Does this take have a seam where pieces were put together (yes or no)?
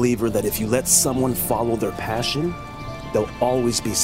no